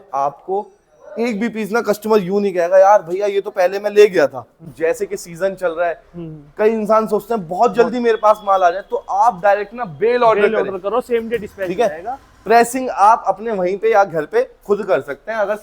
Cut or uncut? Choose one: cut